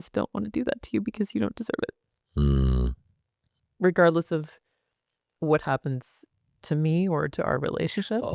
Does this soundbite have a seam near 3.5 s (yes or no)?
yes